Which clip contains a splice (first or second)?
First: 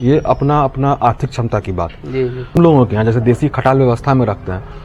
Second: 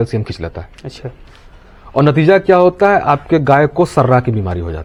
first